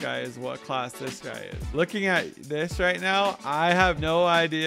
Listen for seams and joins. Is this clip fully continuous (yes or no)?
no